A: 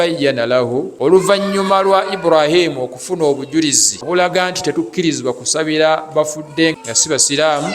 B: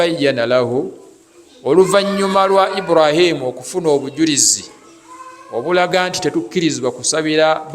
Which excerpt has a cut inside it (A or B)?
A